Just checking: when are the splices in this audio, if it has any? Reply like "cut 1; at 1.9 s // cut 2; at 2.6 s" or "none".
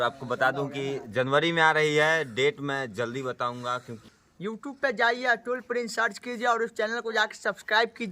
cut 1; at 3.9 s